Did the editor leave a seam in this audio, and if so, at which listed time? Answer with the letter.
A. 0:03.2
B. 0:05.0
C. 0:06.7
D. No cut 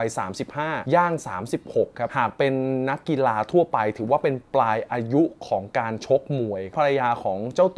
C